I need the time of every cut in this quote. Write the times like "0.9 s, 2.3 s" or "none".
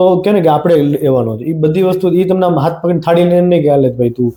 none